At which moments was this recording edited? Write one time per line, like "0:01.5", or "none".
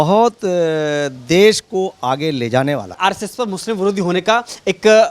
0:03.0

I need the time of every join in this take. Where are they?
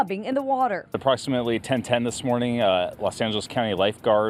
0:01.2

